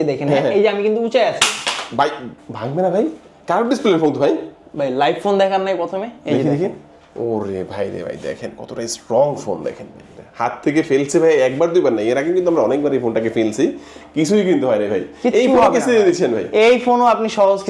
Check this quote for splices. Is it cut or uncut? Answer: uncut